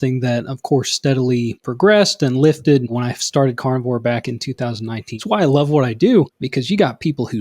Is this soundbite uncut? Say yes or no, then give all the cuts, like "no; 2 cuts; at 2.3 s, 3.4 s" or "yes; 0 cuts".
no; 4 cuts; at 1.6 s, 2.9 s, 5.1 s, 6.4 s